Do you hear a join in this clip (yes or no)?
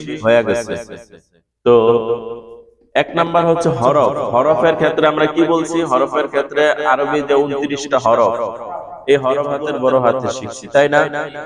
yes